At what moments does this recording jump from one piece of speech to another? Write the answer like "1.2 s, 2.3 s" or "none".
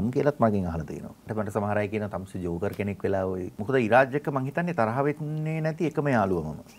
1.2 s, 3.5 s

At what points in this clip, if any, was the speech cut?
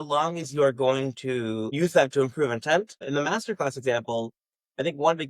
1.7 s, 3.0 s

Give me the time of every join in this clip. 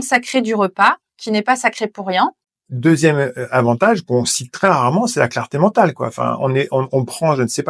2.4 s

